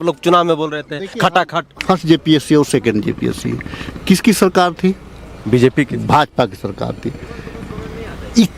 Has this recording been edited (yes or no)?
yes